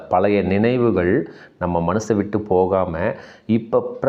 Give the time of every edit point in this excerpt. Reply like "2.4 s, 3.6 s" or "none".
none